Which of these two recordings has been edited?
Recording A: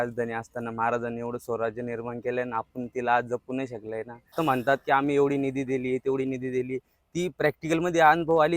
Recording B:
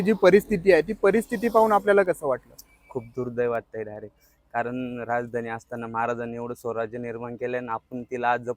A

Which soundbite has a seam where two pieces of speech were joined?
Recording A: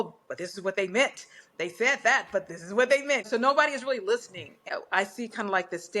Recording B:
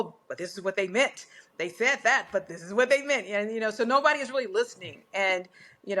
A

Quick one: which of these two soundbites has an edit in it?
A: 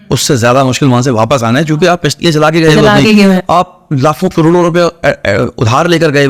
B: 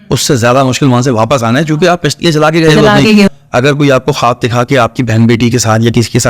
B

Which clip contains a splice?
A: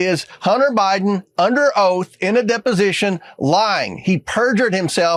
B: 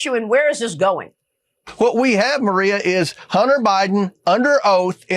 B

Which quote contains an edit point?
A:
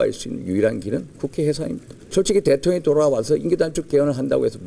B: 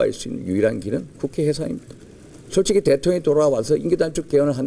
A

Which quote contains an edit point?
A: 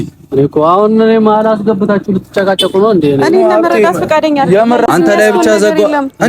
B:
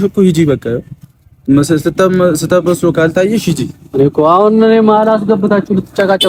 A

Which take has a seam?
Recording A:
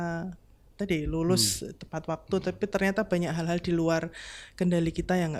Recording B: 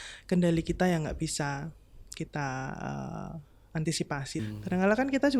B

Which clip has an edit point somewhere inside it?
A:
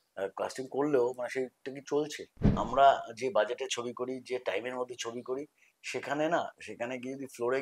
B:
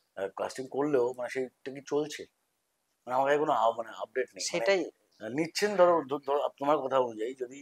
A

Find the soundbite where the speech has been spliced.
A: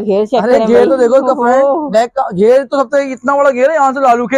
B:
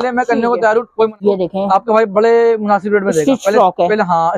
B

